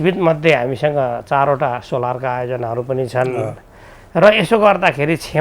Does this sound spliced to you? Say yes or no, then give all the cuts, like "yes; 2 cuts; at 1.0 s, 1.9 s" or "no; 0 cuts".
no; 0 cuts